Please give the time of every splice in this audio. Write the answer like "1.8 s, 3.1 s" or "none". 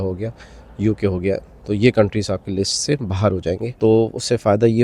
3.7 s